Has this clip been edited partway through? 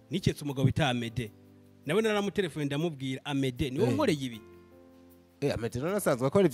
no; 0 cuts

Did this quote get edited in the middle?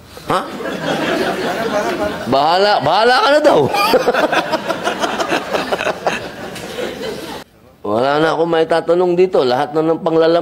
yes; 1 cut; at 7.5 s

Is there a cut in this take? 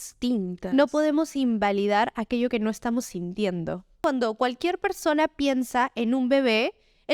yes; 1 cut; at 4.0 s

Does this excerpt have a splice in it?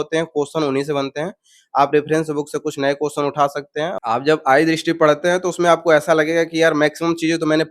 yes; 1 cut; at 3.9 s

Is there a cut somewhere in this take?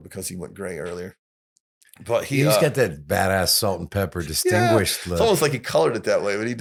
no; 0 cuts

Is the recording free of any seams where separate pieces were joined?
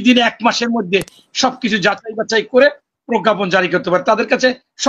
yes; 0 cuts

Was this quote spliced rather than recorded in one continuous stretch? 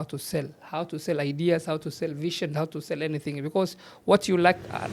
no; 0 cuts

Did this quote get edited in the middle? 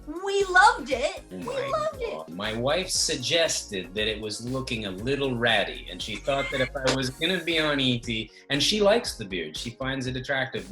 yes; 2 cuts; at 1.3 s, 2.3 s

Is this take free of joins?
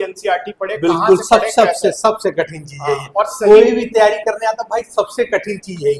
yes; 0 cuts

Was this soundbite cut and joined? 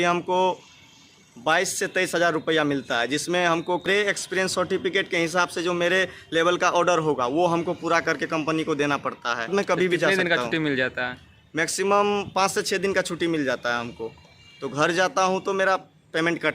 yes; 2 cuts; at 3.9 s, 9.5 s

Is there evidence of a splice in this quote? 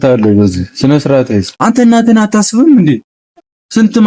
yes; 1 cut; at 1.5 s

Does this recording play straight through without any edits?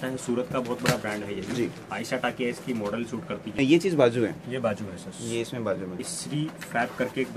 no; 2 cuts; at 3.6 s, 6.1 s

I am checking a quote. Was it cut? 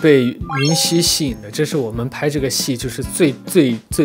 no; 0 cuts

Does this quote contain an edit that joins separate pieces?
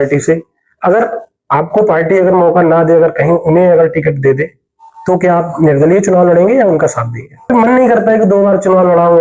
yes; 1 cut; at 7.5 s

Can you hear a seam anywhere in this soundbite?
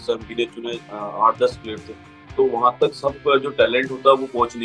yes; 1 cut; at 2.2 s

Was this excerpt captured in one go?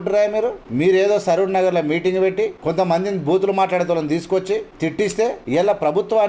no; 2 cuts; at 2.6 s, 5.0 s

